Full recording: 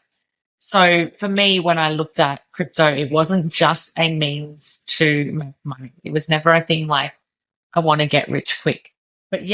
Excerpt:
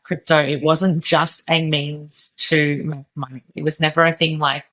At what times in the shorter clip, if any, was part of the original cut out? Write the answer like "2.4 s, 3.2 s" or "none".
none